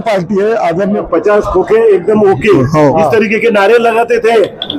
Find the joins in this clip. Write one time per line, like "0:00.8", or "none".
0:01.1